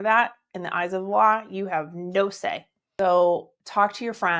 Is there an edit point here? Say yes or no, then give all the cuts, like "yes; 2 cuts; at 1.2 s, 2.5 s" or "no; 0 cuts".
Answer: yes; 1 cut; at 2.8 s